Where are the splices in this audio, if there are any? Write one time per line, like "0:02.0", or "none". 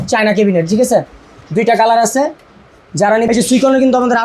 0:03.3